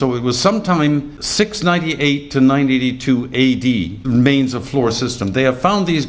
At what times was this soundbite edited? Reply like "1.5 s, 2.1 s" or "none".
1.2 s, 4.0 s